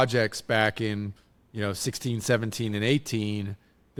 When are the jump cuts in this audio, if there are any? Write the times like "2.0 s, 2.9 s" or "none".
none